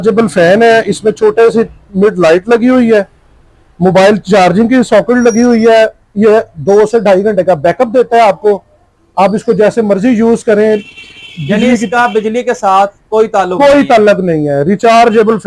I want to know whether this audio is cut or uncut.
uncut